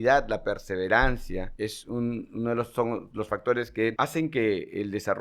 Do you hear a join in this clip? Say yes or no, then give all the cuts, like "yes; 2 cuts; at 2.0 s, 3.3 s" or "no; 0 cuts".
yes; 2 cuts; at 1.5 s, 3.9 s